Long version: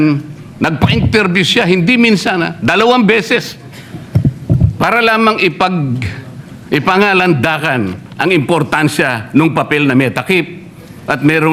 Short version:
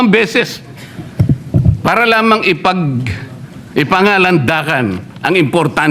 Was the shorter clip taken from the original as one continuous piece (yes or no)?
yes